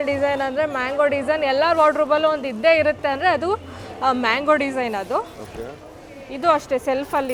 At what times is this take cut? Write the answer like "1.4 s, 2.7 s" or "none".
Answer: none